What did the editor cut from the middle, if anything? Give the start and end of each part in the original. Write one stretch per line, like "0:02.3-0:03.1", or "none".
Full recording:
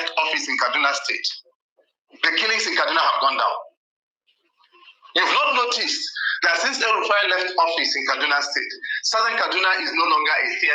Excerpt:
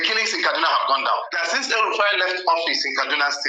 0:03.7-0:06.4